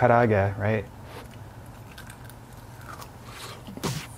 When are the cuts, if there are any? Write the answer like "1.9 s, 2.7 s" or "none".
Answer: none